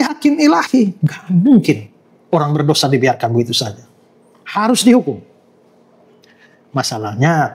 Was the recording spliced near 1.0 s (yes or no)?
no